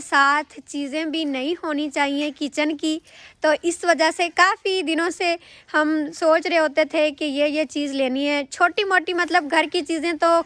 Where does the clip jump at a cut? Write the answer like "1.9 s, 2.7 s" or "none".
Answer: none

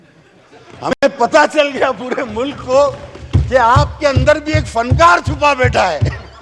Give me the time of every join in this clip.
none

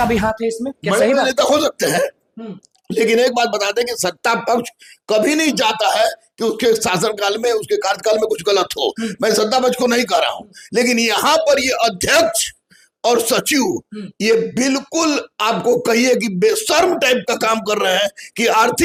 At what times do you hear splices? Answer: none

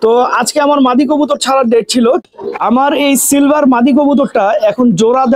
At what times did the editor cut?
2.2 s

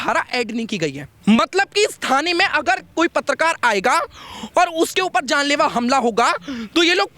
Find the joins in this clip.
1.1 s

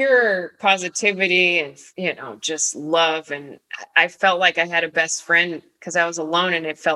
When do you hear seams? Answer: 1.8 s

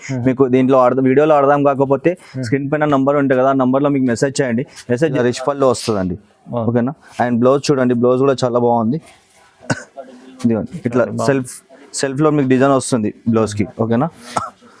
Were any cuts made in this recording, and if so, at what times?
5.2 s

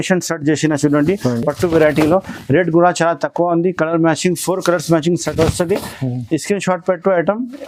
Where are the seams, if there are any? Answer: none

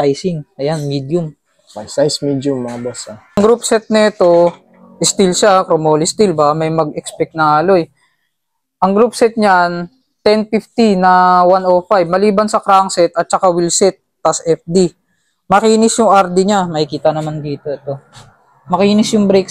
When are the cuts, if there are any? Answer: 3.4 s

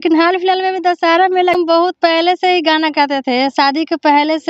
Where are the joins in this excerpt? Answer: 1.6 s

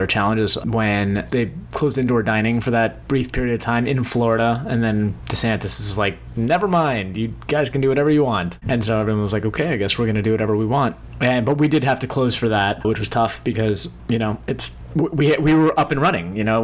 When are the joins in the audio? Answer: 1.3 s, 3.0 s, 5.2 s, 6.2 s, 8.6 s, 11.1 s, 12.8 s, 13.9 s, 14.7 s

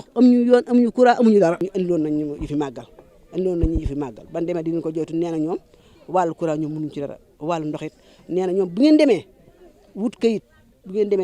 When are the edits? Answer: 1.7 s

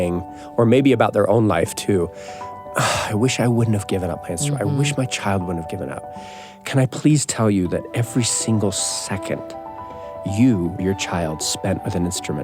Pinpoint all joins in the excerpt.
10.8 s

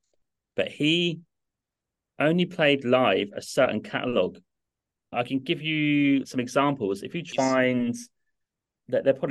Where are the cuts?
7.3 s

